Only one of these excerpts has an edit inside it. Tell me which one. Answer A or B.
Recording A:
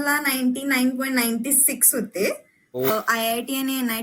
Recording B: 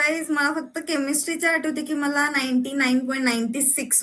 A